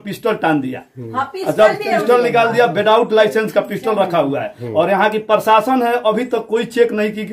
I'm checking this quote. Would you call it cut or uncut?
uncut